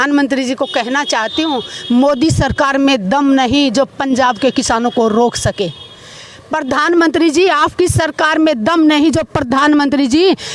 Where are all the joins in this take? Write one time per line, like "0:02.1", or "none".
none